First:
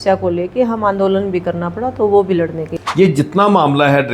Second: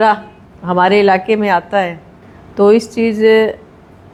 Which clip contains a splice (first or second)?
first